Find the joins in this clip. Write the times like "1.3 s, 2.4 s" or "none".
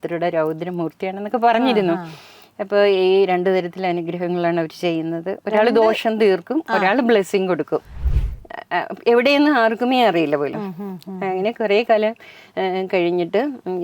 8.0 s